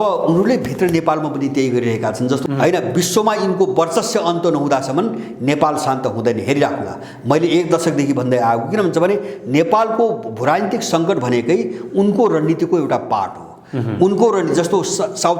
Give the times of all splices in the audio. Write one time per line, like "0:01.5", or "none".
0:02.4